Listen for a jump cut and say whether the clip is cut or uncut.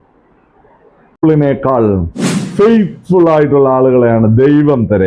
cut